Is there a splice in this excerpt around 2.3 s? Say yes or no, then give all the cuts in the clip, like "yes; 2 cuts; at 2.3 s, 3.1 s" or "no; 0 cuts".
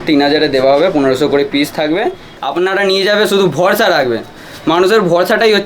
yes; 1 cut; at 2.3 s